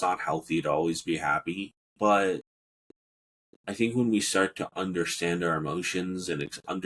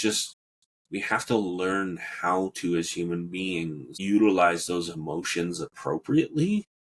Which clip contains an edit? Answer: second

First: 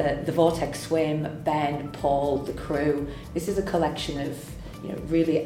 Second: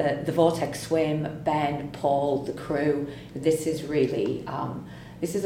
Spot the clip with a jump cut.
first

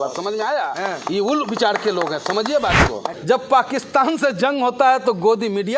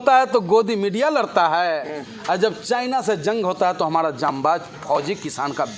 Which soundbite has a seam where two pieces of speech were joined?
first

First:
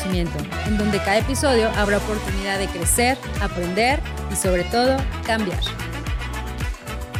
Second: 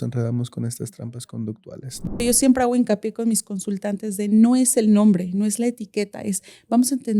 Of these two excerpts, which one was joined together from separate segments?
second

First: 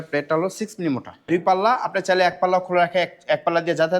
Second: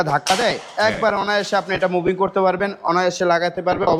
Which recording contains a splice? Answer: first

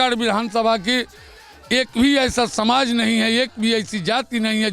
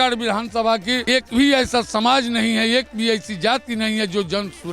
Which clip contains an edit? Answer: second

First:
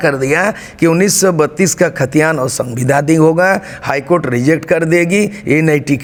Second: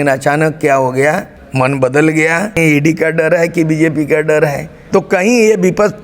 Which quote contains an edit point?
second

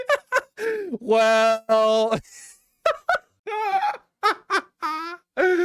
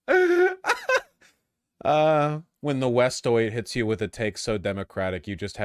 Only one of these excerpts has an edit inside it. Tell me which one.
first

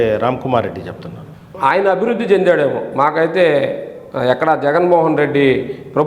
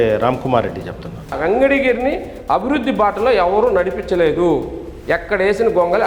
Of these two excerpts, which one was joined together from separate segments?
second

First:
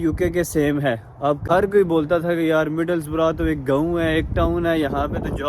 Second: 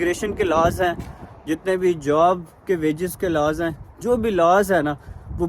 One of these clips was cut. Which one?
first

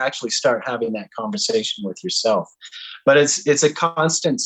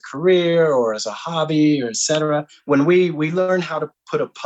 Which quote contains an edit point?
second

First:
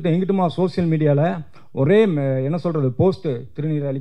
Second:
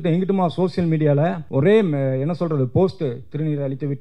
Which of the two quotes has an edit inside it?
second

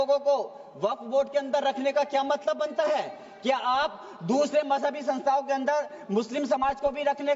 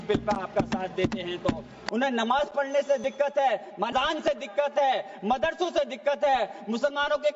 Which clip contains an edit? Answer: second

